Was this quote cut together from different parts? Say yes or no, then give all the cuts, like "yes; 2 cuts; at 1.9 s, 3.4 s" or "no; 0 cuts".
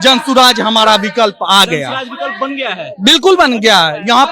no; 0 cuts